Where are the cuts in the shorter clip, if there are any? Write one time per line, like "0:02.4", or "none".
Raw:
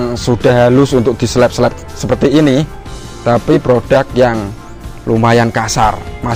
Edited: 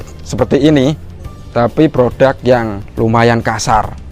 0:02.8